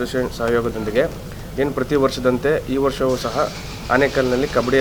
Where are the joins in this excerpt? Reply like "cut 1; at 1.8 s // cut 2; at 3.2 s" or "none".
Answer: none